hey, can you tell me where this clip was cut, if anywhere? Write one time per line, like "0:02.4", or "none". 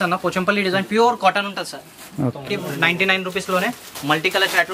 0:02.5